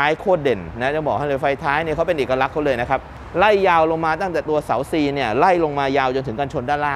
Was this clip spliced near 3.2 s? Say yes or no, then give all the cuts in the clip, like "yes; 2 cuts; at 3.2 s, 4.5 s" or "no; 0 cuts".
no; 0 cuts